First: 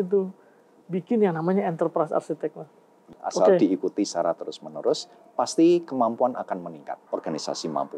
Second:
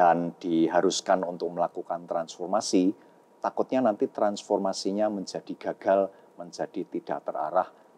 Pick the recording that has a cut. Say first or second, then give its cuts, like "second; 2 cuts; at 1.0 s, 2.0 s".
first; 2 cuts; at 3.2 s, 7.0 s